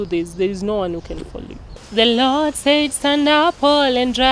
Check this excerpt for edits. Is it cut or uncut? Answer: cut